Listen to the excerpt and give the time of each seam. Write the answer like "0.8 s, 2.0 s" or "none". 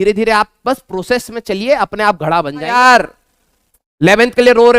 2.6 s